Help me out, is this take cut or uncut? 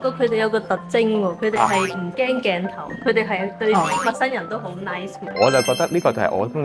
uncut